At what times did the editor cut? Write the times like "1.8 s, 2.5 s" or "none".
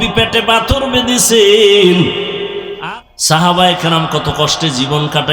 2.7 s